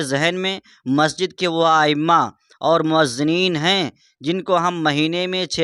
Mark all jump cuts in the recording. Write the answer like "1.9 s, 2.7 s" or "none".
none